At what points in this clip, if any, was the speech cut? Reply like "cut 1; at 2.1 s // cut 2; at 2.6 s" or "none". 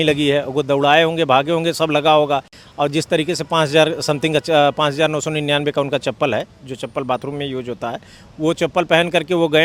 none